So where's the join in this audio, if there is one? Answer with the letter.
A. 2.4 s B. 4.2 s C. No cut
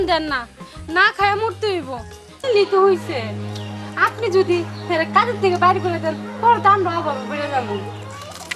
A